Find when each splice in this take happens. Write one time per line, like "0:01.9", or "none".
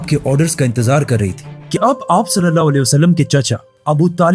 0:01.8